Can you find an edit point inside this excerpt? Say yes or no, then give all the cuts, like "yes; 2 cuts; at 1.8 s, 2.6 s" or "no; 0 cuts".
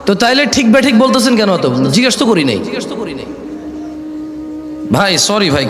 yes; 2 cuts; at 3.2 s, 4.6 s